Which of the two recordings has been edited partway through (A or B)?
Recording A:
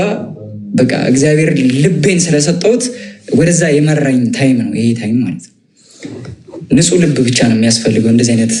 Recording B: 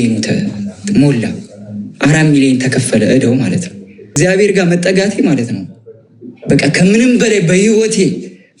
B